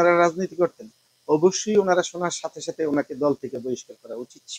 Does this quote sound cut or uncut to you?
uncut